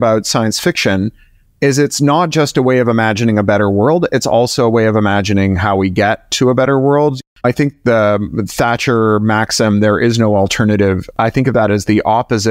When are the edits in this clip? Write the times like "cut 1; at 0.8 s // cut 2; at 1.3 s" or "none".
cut 1; at 7.2 s